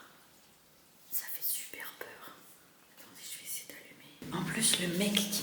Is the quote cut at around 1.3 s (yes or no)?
no